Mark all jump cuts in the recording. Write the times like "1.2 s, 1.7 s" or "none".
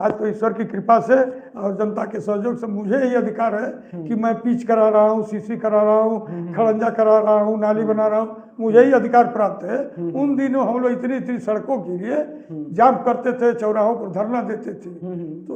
none